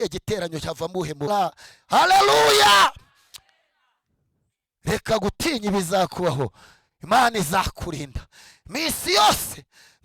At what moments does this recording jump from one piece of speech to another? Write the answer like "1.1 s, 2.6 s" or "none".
1.3 s